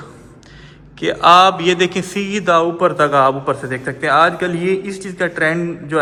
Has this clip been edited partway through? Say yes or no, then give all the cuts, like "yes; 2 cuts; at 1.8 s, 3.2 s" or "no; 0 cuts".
no; 0 cuts